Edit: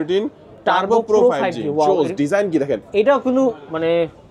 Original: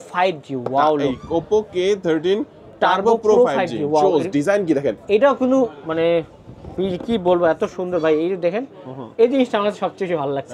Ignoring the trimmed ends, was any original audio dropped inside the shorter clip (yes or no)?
no